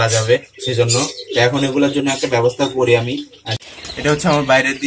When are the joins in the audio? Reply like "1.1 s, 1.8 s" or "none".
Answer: 3.4 s